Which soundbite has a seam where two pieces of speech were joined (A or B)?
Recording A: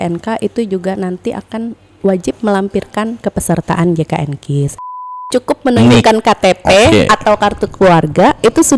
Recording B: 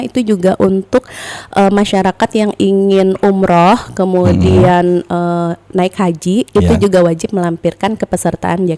A